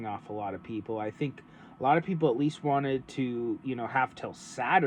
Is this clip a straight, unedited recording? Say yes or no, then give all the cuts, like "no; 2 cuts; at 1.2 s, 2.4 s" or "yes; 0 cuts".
yes; 0 cuts